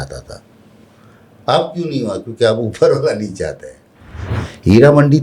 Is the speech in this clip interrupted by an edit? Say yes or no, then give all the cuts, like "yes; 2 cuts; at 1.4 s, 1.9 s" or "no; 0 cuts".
yes; 1 cut; at 4.3 s